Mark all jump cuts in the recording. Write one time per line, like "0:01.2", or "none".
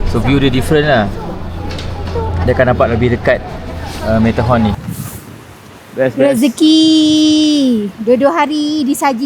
0:04.9